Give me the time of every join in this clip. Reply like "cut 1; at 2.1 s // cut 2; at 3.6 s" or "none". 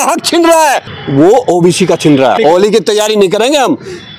cut 1; at 0.9 s // cut 2; at 2.4 s